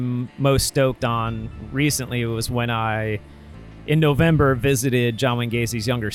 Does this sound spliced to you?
no; 0 cuts

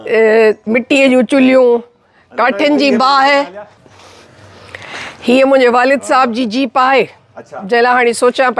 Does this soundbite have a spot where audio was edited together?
yes; 1 cut; at 3.8 s

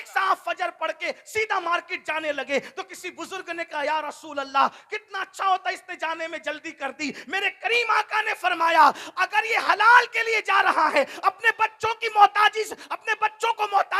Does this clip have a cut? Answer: no; 0 cuts

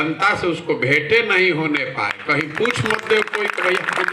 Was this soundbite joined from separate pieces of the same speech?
no; 0 cuts

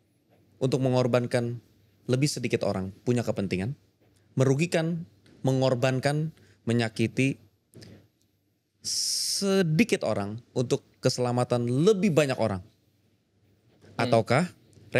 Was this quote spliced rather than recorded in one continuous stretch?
no; 0 cuts

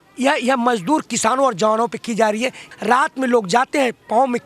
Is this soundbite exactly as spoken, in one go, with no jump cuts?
no; 1 cut; at 2.7 s

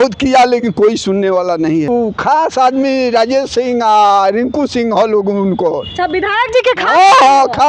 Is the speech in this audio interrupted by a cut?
yes; 1 cut; at 1.9 s

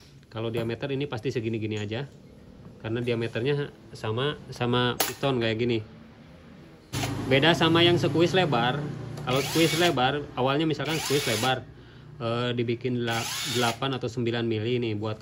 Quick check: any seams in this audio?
yes; 1 cut; at 7.0 s

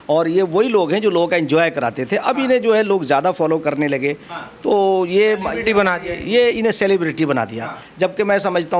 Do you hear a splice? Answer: no; 0 cuts

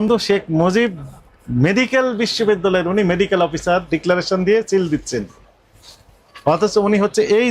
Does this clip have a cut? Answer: no; 0 cuts

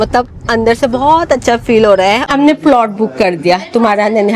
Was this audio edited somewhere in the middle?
yes; 1 cut; at 2.2 s

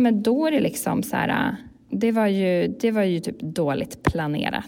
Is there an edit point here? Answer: yes; 1 cut; at 1.8 s

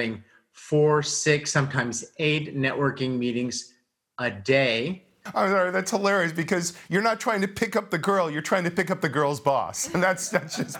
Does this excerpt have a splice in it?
yes; 1 cut; at 5.2 s

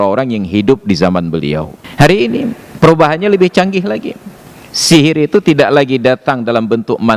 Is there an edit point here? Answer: yes; 2 cuts; at 1.8 s, 2.6 s

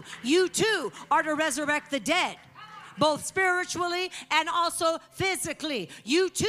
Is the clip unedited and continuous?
yes; 0 cuts

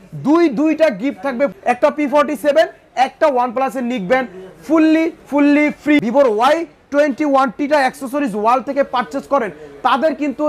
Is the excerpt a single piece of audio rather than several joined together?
no; 2 cuts; at 1.6 s, 6.0 s

